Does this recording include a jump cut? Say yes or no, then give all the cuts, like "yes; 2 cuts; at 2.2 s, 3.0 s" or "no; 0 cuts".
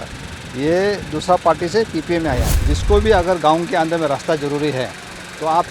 yes; 1 cut; at 2.5 s